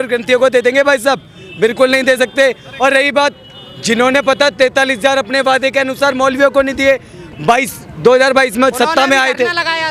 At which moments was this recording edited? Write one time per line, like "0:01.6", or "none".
none